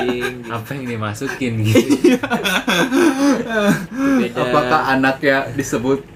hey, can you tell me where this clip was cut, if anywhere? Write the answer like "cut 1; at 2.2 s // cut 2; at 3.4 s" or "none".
none